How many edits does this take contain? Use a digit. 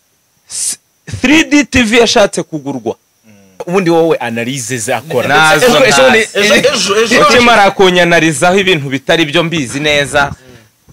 1